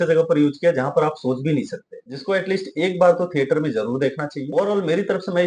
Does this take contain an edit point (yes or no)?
yes